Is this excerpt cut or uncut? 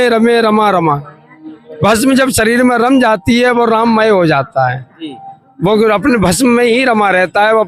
uncut